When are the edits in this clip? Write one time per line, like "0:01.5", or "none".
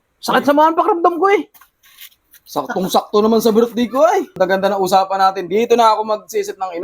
0:04.3